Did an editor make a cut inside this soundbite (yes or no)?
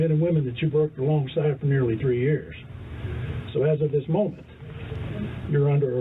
no